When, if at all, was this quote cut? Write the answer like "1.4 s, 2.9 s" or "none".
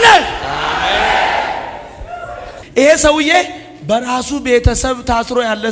2.5 s